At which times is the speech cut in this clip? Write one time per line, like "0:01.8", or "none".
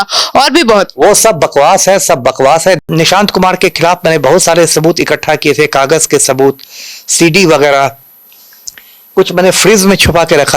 0:02.8